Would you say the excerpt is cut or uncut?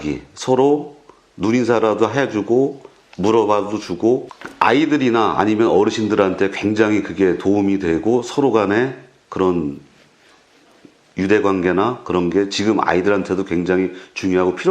cut